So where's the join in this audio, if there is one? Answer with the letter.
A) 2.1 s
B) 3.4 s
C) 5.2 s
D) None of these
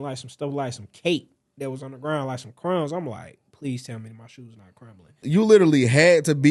C